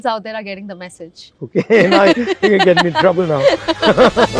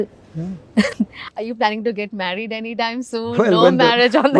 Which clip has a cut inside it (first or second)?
second